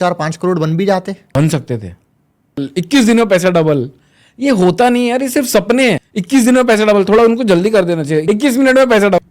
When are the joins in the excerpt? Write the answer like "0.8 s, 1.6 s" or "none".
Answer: 1.2 s